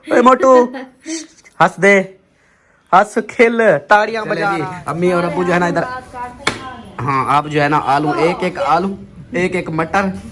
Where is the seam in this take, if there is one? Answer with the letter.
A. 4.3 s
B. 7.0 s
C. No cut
A